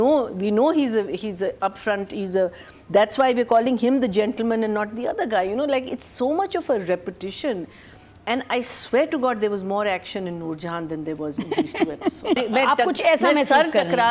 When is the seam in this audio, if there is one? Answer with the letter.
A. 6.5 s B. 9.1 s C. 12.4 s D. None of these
C